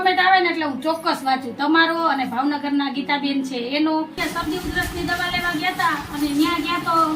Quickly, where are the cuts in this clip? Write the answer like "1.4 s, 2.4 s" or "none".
4.2 s